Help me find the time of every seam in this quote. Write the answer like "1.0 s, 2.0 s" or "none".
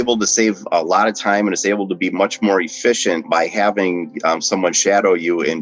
3.3 s